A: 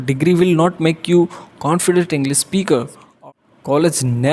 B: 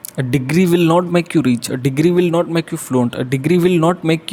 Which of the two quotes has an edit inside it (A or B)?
A